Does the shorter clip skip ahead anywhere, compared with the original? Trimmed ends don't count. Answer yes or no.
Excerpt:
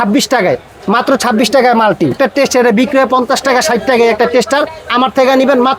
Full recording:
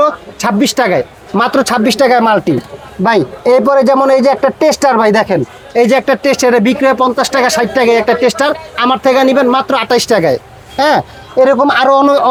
yes